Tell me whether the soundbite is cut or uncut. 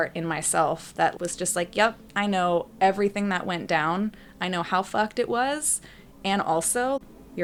uncut